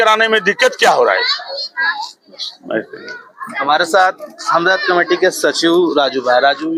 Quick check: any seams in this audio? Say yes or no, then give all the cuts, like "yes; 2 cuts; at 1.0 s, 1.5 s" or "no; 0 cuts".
no; 0 cuts